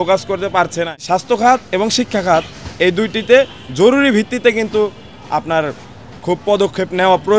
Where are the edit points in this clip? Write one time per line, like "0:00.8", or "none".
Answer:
0:01.0

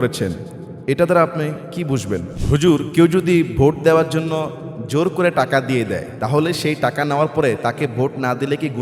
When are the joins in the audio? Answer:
0:02.3

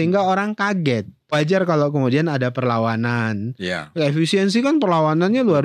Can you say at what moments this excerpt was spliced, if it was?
0:01.3

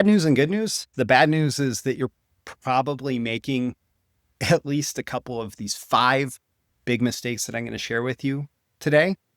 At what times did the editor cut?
0:00.9
0:05.5

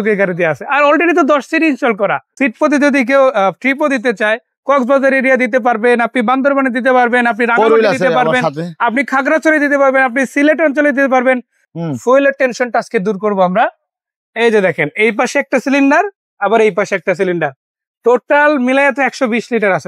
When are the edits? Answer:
0:02.3
0:11.6

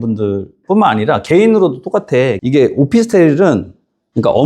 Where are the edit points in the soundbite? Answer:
0:02.4

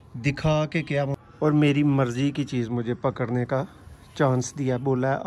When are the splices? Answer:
0:01.2

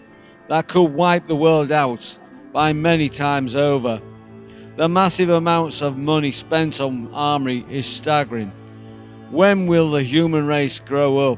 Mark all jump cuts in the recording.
none

